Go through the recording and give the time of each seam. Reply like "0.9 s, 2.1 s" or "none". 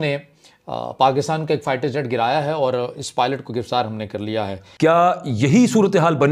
4.5 s